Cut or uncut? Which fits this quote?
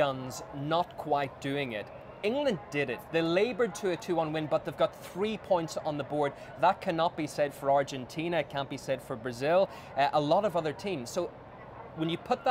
cut